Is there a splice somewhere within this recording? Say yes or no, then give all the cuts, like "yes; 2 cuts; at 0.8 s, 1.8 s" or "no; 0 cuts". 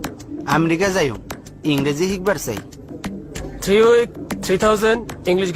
no; 0 cuts